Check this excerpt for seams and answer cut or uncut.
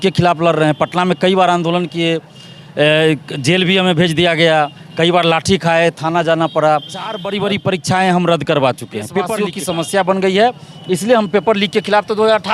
cut